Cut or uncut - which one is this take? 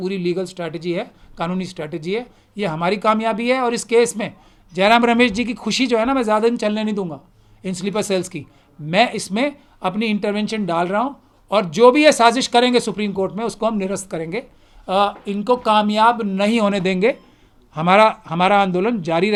uncut